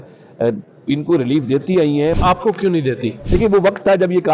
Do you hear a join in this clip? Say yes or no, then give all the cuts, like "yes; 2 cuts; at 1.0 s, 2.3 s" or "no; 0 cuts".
yes; 2 cuts; at 2.1 s, 3.2 s